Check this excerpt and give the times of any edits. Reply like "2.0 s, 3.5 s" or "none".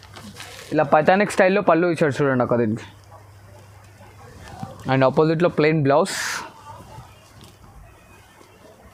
none